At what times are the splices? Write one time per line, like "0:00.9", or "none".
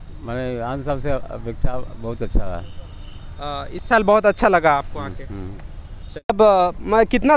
0:06.3